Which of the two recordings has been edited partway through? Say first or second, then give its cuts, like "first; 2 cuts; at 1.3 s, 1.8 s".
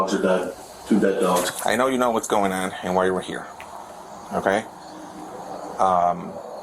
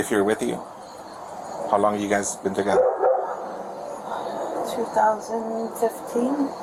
first; 1 cut; at 1.5 s